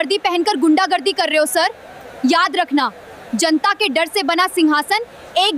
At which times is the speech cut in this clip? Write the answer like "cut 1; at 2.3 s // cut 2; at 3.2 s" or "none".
none